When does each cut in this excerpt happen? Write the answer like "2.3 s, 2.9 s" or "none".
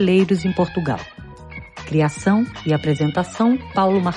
none